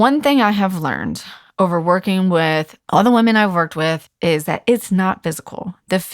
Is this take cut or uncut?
cut